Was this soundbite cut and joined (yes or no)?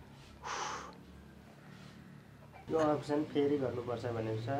yes